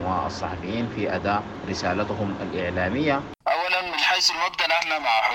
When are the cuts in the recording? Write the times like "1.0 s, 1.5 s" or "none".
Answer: 1.5 s, 3.3 s